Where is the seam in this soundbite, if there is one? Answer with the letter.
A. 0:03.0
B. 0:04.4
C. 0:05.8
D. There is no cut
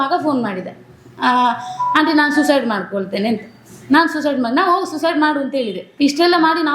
C